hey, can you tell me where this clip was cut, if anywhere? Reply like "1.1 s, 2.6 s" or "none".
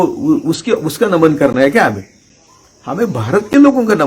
none